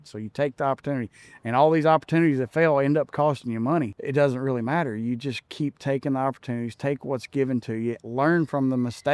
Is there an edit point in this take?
yes; 1 cut; at 4.0 s

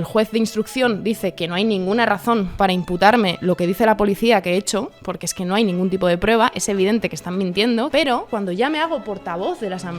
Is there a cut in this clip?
yes; 2 cuts; at 2.5 s, 8.1 s

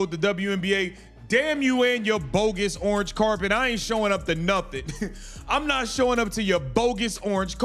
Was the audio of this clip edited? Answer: no; 0 cuts

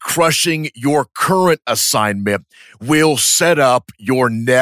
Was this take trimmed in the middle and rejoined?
no; 0 cuts

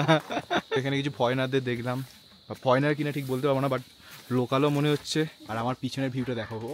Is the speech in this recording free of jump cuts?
no; 2 cuts; at 0.8 s, 5.4 s

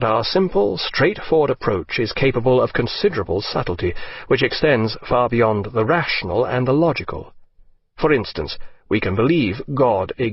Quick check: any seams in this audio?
yes; 1 cut; at 6.3 s

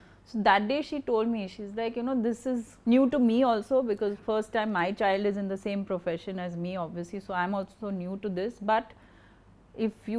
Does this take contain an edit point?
no; 0 cuts

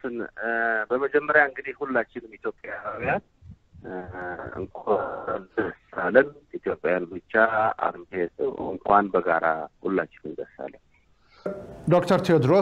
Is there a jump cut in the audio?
no; 0 cuts

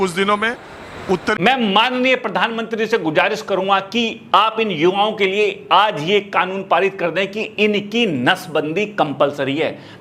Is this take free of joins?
no; 1 cut; at 1.4 s

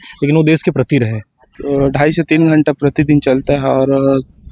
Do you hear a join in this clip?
yes; 1 cut; at 1.5 s

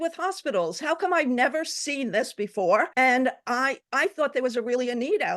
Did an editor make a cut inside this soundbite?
yes; 1 cut; at 2.9 s

